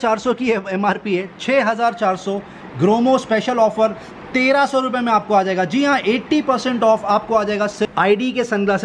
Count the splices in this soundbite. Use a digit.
1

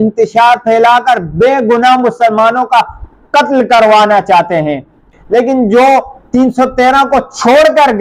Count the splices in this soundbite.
1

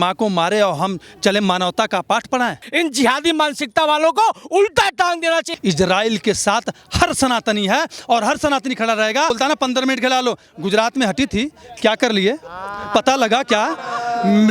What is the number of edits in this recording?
3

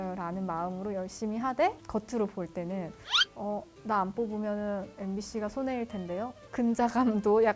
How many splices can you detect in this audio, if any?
1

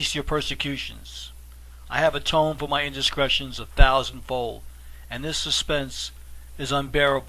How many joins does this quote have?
1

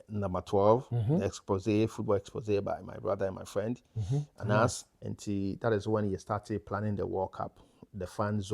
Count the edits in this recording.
1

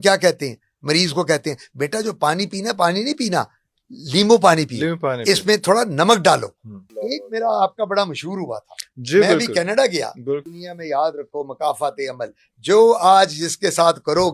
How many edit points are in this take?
2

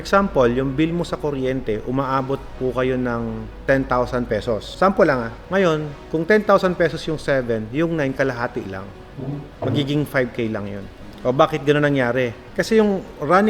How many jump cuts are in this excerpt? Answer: 4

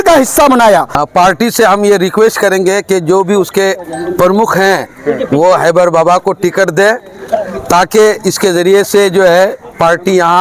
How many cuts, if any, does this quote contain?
1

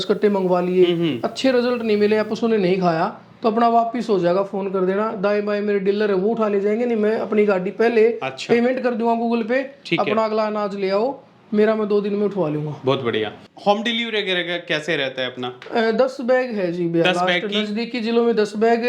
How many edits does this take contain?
1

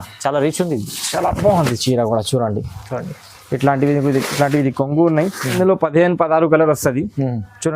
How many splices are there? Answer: 1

